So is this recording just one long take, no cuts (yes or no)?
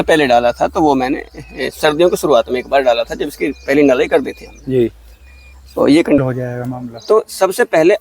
no